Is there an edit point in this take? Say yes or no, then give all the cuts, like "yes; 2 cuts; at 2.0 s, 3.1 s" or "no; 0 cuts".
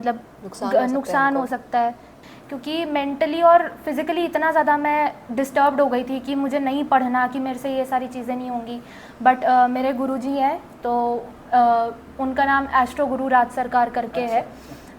yes; 1 cut; at 2.1 s